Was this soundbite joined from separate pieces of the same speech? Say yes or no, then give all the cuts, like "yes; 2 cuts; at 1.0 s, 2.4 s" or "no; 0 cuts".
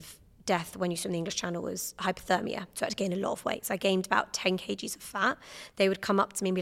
no; 0 cuts